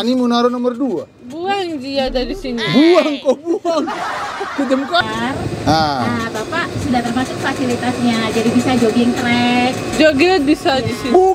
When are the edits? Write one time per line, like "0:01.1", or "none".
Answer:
0:05.0